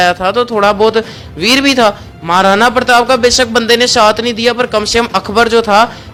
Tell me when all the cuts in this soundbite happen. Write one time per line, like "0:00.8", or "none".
none

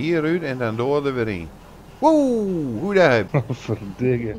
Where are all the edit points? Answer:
0:03.3

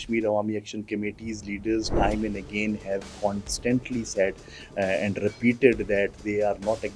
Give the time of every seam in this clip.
none

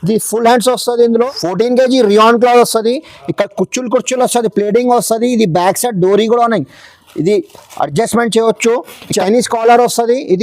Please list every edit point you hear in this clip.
0:01.3
0:09.1

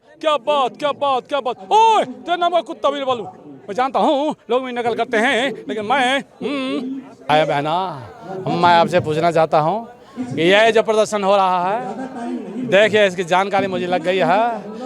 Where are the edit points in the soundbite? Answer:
0:07.3

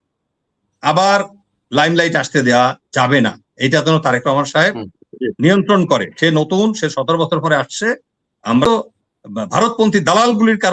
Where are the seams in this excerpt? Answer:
0:08.7

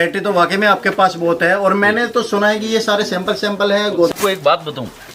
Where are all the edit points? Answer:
0:04.1

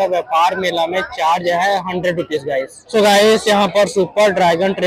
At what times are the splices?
0:02.8

